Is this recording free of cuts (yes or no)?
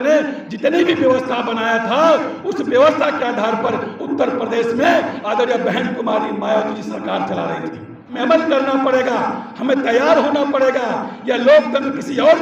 no